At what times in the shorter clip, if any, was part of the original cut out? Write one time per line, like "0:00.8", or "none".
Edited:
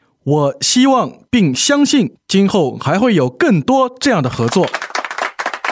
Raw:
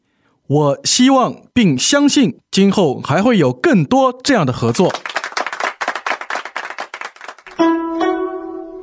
0:04.7